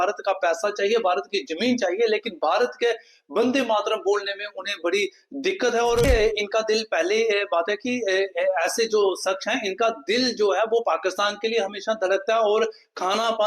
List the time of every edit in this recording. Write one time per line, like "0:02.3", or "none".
0:06.0